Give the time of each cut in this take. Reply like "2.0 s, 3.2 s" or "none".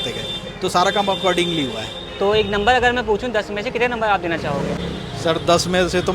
4.8 s